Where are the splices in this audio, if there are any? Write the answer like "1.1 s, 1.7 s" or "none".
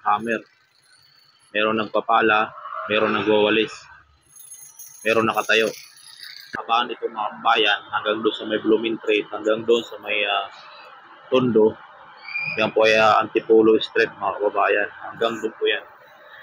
6.6 s